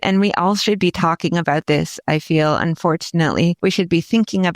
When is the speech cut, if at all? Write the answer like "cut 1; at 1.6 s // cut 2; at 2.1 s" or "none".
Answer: cut 1; at 3.6 s